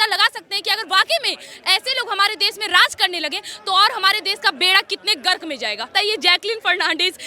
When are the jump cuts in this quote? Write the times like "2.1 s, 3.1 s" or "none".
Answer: 5.9 s